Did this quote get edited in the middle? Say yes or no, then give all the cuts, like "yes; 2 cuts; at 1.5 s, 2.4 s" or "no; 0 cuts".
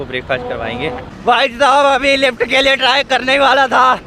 yes; 1 cut; at 1.1 s